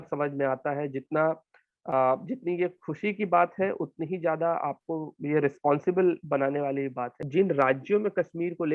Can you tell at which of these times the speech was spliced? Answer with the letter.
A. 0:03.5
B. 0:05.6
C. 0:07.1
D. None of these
C